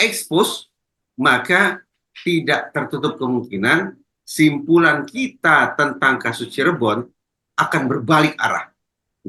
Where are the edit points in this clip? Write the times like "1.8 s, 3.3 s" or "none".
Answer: none